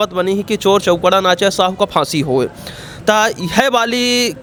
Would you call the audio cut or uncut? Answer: uncut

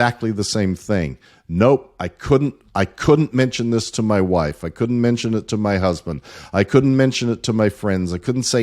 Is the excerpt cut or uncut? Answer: uncut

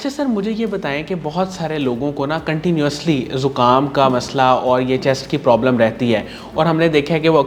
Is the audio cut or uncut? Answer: uncut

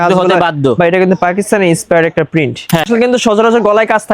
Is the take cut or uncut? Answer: cut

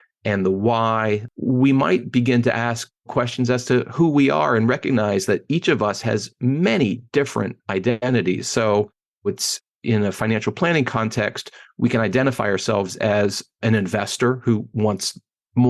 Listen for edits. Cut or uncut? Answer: cut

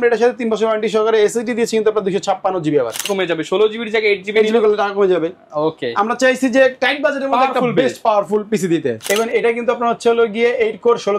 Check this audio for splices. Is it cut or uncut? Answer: cut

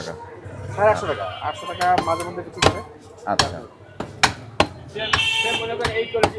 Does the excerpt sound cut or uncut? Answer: uncut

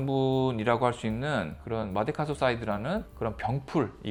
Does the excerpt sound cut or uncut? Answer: uncut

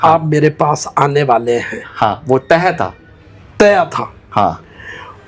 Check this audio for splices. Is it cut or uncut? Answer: uncut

